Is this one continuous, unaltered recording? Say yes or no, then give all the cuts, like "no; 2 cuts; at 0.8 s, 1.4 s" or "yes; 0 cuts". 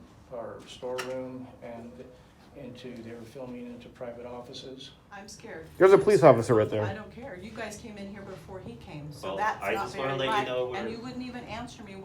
no; 1 cut; at 5.3 s